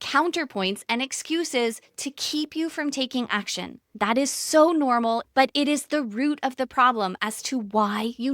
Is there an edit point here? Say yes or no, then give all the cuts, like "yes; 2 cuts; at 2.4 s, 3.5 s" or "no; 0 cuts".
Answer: yes; 2 cuts; at 3.9 s, 5.2 s